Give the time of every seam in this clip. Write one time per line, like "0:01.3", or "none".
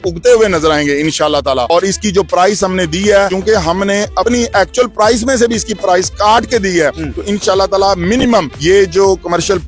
none